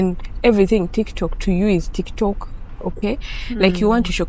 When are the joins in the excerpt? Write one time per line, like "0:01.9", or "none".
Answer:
none